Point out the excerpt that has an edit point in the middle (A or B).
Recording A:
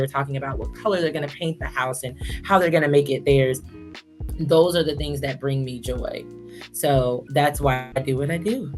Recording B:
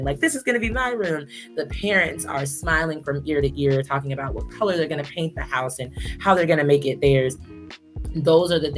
A